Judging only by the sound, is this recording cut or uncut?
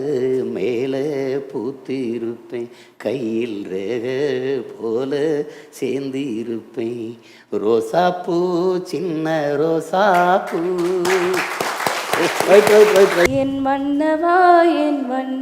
cut